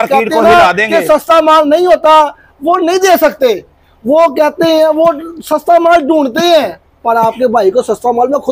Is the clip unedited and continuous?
yes; 0 cuts

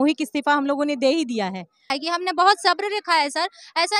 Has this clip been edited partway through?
yes; 1 cut; at 1.9 s

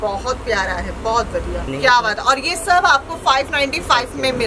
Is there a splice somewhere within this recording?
yes; 1 cut; at 1.7 s

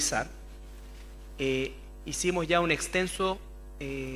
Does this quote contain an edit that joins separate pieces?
no; 0 cuts

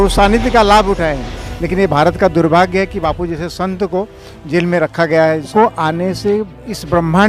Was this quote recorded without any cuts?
no; 2 cuts; at 1.3 s, 5.5 s

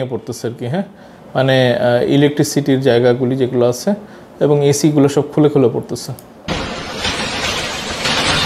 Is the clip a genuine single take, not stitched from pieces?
yes; 0 cuts

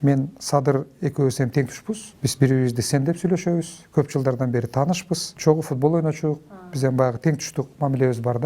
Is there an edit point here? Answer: yes; 2 cuts; at 2.1 s, 5.3 s

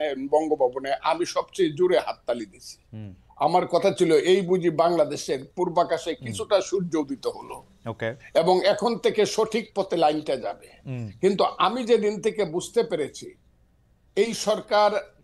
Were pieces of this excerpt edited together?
no; 0 cuts

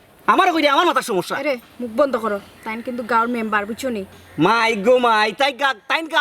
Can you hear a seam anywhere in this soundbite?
no; 0 cuts

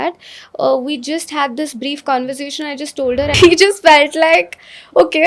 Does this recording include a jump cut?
yes; 1 cut; at 3.3 s

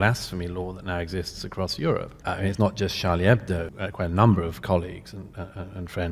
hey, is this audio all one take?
no; 2 cuts; at 2.1 s, 3.7 s

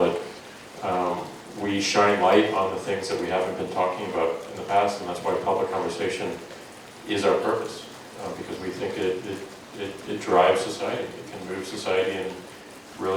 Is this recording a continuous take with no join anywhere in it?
yes; 0 cuts

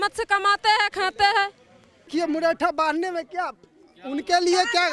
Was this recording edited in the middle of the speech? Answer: yes; 1 cut; at 2.1 s

